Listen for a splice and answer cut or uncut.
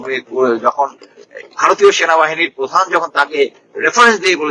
uncut